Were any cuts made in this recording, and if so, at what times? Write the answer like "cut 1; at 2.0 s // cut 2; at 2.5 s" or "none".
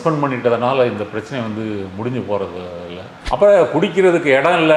cut 1; at 3.1 s

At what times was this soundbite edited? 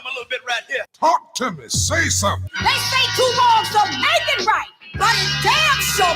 cut 1; at 0.9 s // cut 2; at 2.5 s

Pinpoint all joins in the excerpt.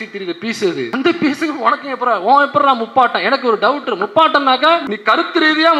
cut 1; at 0.9 s // cut 2; at 4.9 s

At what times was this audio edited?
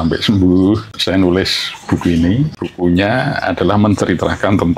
cut 1; at 0.9 s // cut 2; at 2.6 s

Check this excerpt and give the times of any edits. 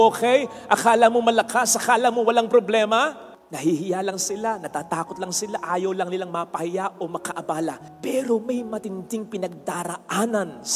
none

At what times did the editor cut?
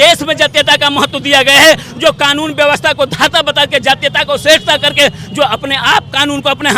none

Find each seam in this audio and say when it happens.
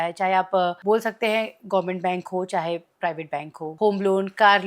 cut 1; at 0.8 s // cut 2; at 3.6 s

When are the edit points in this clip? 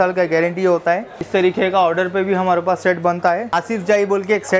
cut 1; at 1.2 s // cut 2; at 3.6 s

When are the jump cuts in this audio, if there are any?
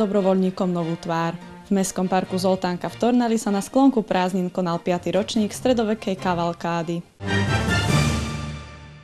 cut 1; at 1.4 s // cut 2; at 7.1 s

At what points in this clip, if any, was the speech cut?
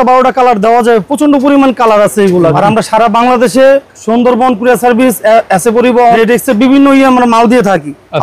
cut 1; at 2.6 s // cut 2; at 6.2 s

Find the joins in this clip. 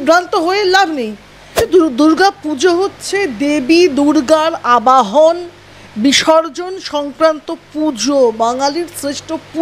cut 1; at 1.7 s

